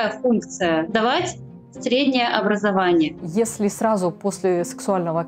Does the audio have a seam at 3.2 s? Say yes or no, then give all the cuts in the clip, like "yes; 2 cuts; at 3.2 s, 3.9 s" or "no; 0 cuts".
yes; 2 cuts; at 0.9 s, 3.2 s